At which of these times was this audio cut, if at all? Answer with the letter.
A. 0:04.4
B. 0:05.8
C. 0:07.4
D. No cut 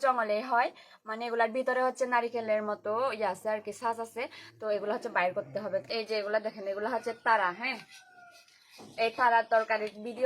B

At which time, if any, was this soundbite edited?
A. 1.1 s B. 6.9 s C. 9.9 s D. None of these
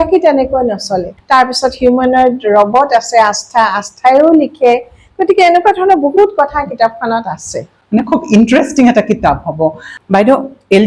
A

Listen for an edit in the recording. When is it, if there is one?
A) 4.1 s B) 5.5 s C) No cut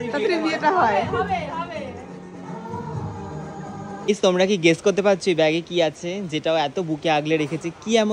A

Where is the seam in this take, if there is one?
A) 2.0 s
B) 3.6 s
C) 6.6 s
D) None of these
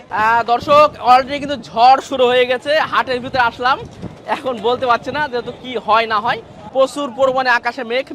D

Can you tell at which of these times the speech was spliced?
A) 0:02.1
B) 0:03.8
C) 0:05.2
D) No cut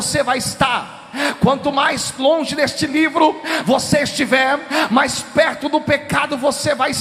A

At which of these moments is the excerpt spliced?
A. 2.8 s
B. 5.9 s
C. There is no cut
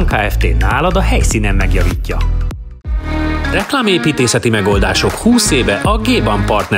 A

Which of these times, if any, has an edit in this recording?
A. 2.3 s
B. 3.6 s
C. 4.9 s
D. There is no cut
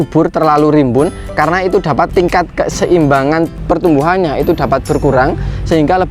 B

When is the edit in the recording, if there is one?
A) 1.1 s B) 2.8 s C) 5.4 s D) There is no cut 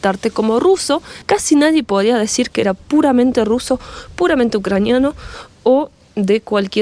A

